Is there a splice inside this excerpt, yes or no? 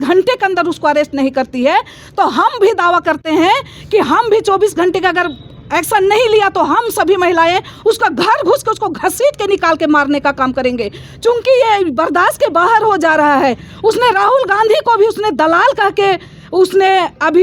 no